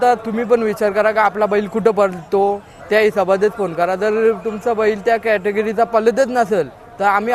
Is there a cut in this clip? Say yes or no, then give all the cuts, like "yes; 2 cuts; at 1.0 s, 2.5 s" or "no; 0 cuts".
no; 0 cuts